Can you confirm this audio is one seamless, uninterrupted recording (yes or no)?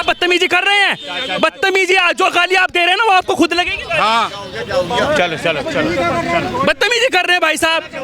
yes